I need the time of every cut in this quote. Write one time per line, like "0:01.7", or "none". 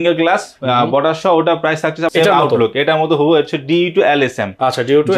0:02.1

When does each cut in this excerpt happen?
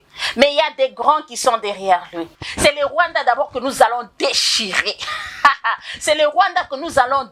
0:02.4

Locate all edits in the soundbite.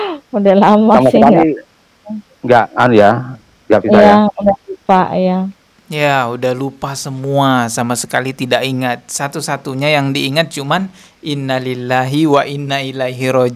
none

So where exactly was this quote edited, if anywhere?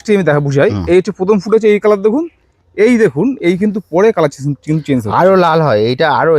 none

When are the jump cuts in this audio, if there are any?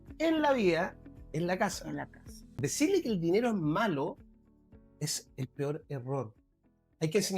0:02.6

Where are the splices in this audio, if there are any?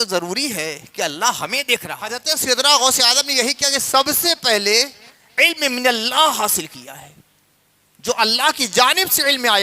0:02.2

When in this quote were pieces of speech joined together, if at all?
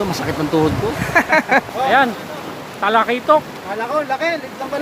0:01.7

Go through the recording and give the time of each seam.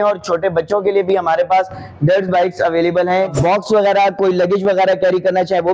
0:03.3

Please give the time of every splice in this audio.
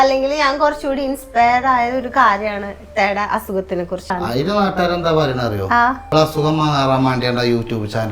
0:04.1
0:06.0

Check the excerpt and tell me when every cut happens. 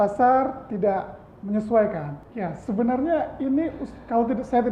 0:02.2

